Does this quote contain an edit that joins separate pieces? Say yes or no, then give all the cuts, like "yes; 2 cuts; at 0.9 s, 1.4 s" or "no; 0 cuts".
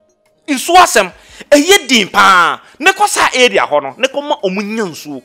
no; 0 cuts